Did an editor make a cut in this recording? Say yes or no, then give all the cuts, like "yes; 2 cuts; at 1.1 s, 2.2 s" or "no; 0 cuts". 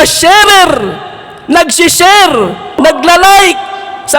yes; 1 cut; at 2.8 s